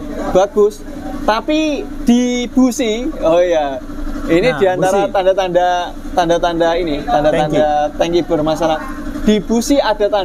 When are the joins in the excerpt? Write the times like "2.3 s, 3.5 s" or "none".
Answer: none